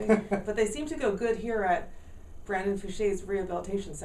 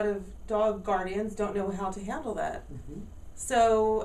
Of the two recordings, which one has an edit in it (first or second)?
first